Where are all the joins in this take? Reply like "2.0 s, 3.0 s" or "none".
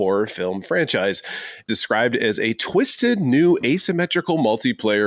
1.6 s